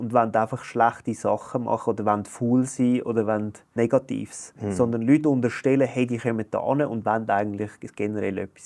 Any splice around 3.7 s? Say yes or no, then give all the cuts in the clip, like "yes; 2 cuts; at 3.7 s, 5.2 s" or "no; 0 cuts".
yes; 1 cut; at 3.7 s